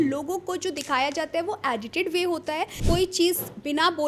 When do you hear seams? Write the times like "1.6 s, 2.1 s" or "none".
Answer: 2.8 s